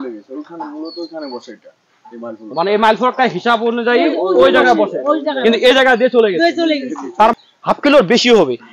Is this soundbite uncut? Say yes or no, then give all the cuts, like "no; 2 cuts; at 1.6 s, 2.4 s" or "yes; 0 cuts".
no; 1 cut; at 7.3 s